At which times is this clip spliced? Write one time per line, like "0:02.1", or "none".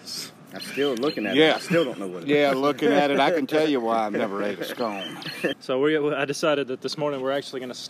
0:05.6